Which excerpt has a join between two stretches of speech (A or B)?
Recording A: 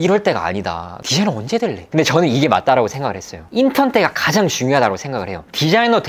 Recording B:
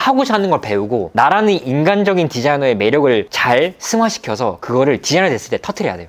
A